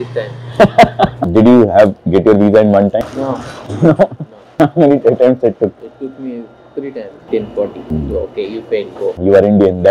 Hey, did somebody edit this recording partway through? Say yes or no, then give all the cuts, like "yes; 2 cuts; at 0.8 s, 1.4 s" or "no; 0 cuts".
yes; 3 cuts; at 1.2 s, 3.0 s, 7.3 s